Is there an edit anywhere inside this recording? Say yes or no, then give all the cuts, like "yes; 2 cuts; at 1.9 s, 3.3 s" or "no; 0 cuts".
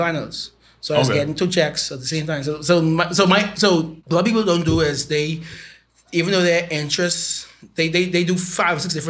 yes; 1 cut; at 4.0 s